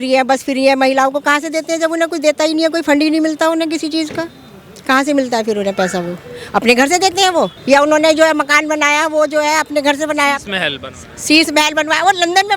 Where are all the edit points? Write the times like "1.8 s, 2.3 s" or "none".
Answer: none